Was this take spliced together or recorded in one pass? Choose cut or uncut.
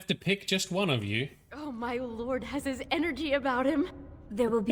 uncut